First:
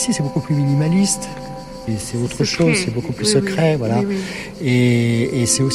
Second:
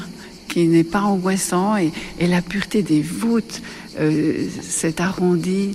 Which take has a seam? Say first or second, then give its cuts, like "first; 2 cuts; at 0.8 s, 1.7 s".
first; 1 cut; at 1.8 s